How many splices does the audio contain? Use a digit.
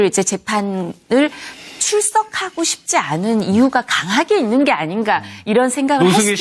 1